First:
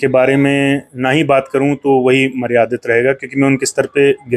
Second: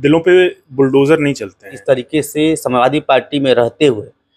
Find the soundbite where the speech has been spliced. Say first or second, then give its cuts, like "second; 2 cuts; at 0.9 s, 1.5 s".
second; 1 cut; at 1.7 s